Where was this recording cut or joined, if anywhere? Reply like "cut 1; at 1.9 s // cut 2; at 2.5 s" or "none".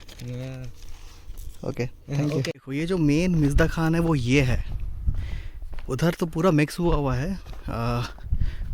cut 1; at 2.6 s